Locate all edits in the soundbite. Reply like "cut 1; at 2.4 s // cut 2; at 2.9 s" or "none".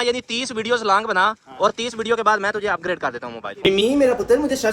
cut 1; at 3.5 s